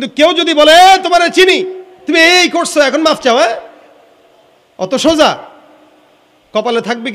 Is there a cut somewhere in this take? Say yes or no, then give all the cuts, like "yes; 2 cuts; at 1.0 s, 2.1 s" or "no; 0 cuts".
no; 0 cuts